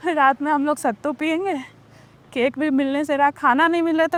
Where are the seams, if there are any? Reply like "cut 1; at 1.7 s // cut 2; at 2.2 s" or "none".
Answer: none